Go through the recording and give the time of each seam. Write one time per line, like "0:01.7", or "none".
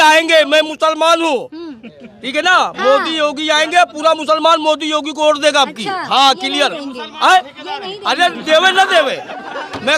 none